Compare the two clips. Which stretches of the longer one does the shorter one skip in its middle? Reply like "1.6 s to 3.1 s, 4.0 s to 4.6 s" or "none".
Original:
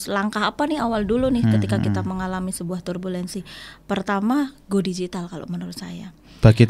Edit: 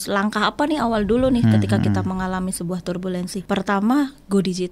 3.4 s to 3.8 s